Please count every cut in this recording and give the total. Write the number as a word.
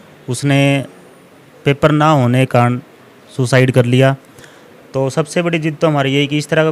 zero